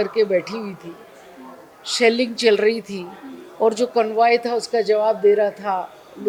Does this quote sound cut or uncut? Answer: uncut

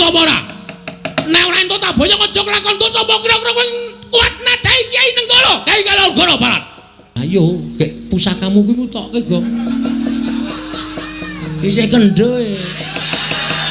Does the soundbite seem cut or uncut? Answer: cut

